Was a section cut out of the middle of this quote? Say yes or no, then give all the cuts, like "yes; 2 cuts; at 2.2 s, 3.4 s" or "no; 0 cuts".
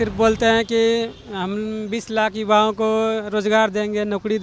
no; 0 cuts